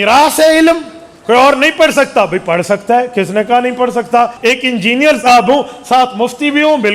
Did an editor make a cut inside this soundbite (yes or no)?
yes